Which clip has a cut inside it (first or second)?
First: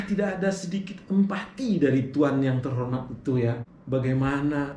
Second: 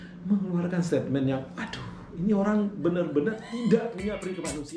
first